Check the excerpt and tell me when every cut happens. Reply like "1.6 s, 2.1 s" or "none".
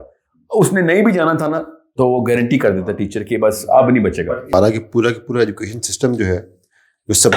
4.5 s